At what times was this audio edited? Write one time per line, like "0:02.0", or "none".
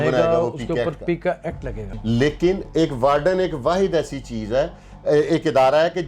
0:01.9